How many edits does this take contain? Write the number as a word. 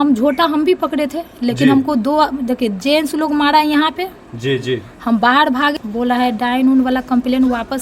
one